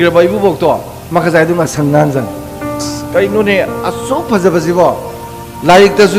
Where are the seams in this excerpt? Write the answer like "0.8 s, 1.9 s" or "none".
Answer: 3.0 s